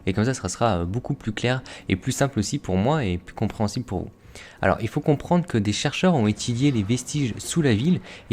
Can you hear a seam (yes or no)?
yes